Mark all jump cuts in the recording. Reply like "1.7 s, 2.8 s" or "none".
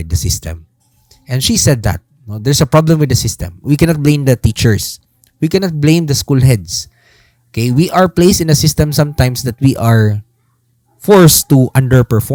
none